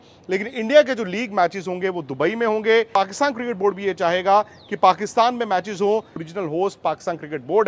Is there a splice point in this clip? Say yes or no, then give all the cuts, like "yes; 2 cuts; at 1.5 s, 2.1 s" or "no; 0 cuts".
yes; 2 cuts; at 2.9 s, 6.2 s